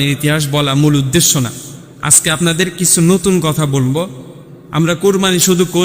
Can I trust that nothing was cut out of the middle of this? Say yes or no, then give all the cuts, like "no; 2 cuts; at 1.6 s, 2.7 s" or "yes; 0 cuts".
yes; 0 cuts